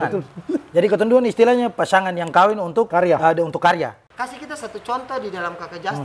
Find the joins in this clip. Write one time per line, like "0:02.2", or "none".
0:02.9
0:04.0

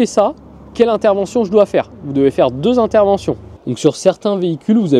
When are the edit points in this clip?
0:03.5

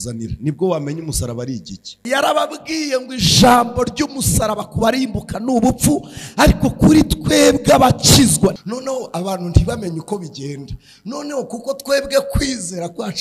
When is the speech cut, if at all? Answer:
0:02.0
0:08.6

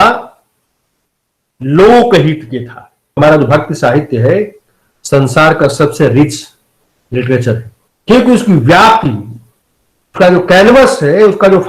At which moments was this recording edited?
0:03.2

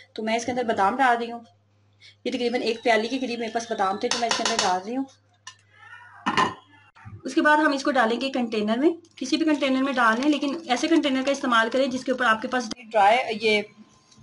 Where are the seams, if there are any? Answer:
0:12.7

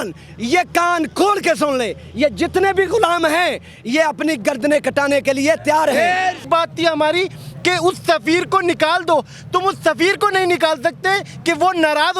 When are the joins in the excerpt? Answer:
0:06.4

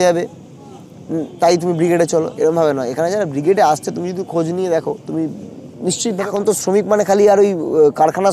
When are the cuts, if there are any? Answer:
0:06.2

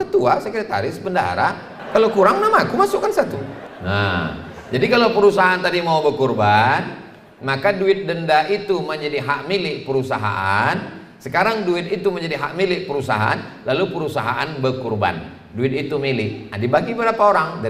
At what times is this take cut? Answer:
0:01.7
0:03.6

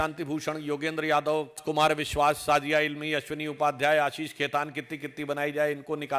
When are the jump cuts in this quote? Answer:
0:01.6

